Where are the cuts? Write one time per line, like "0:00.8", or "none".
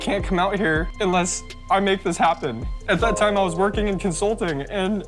0:00.9
0:02.7